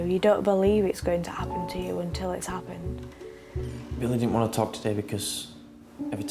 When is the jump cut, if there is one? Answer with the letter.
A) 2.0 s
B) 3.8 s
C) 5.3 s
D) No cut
B